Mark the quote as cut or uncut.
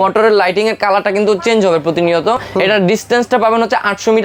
uncut